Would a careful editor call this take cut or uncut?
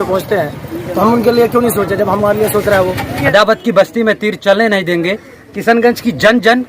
cut